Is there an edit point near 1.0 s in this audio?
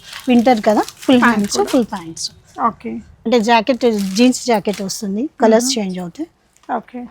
no; 1 cut; at 3.1 s

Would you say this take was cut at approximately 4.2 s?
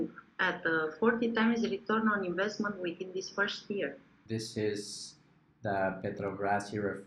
yes; 1 cut; at 4.2 s

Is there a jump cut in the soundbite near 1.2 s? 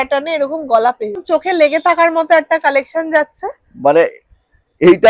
yes; 1 cut; at 1.2 s

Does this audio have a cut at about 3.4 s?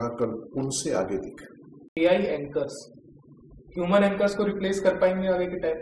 no; 1 cut; at 2.0 s

